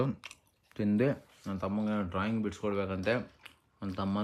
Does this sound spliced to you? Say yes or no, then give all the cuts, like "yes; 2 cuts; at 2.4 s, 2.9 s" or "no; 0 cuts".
no; 0 cuts